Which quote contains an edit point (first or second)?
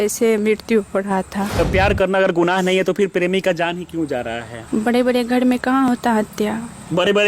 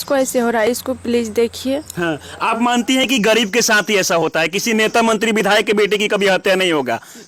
first